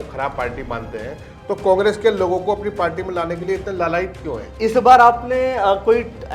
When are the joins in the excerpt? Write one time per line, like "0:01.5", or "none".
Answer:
0:04.5